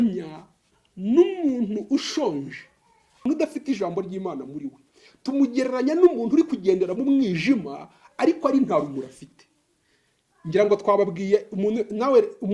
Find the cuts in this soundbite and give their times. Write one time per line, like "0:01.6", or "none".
0:03.2